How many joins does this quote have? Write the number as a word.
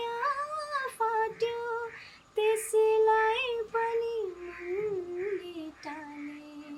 zero